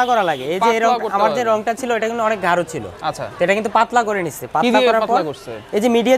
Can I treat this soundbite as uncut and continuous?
yes; 0 cuts

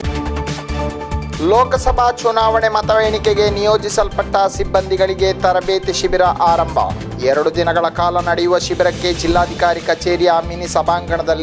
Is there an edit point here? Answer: no; 0 cuts

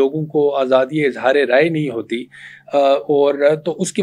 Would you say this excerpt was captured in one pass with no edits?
yes; 0 cuts

